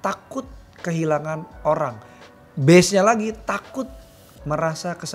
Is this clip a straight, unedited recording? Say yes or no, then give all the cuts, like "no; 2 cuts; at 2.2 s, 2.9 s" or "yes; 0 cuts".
yes; 0 cuts